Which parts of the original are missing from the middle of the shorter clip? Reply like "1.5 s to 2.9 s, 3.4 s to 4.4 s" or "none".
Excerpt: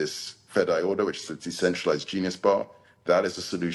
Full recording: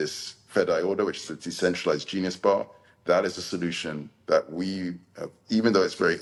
none